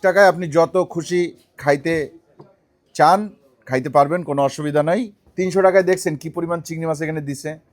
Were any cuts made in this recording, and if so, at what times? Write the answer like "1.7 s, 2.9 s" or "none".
5.2 s